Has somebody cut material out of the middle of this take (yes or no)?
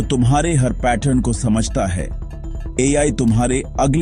no